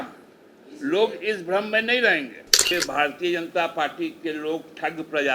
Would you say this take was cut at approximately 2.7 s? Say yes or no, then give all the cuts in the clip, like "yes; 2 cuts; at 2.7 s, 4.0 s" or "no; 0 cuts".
yes; 1 cut; at 2.7 s